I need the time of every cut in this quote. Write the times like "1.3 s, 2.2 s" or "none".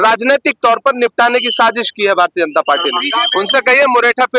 3.3 s